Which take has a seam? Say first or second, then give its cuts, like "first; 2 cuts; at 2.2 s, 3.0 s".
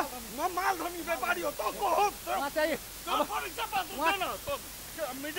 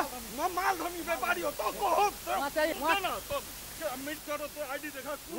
second; 2 cuts; at 2.7 s, 4.2 s